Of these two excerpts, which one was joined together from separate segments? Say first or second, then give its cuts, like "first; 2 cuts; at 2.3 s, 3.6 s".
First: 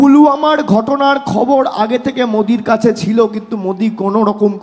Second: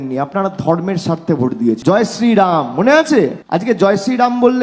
second; 2 cuts; at 1.8 s, 3.4 s